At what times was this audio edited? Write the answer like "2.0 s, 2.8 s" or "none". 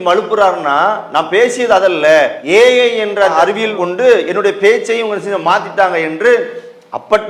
2.4 s